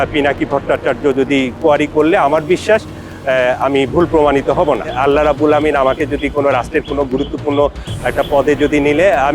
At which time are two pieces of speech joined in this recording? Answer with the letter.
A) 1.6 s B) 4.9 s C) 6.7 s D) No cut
B